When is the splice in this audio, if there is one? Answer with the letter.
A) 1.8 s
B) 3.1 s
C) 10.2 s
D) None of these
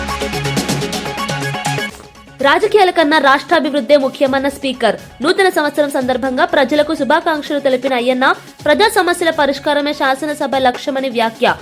A